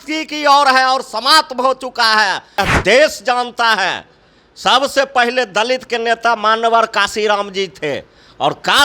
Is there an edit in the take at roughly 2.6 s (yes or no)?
yes